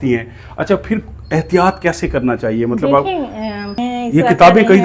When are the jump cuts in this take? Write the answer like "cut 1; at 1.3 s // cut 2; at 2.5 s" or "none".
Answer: cut 1; at 3.8 s